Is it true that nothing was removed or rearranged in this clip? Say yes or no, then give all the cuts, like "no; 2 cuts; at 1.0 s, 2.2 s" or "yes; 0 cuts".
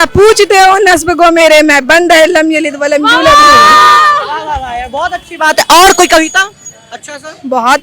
yes; 0 cuts